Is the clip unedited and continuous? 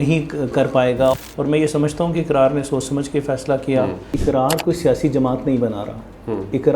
no; 2 cuts; at 1.3 s, 4.2 s

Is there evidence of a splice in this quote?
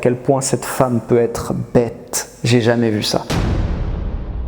no; 0 cuts

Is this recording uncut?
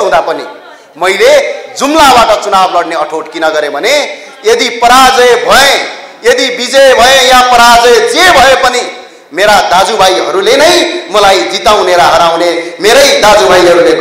yes; 0 cuts

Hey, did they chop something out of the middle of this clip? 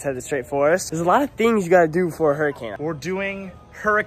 yes; 2 cuts; at 0.9 s, 2.7 s

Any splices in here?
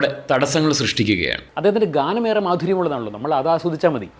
yes; 1 cut; at 1.4 s

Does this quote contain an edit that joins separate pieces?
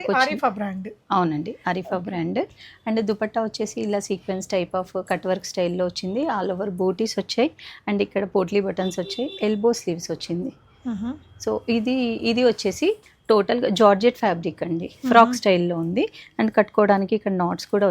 no; 0 cuts

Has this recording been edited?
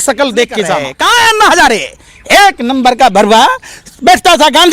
yes; 1 cut; at 0.9 s

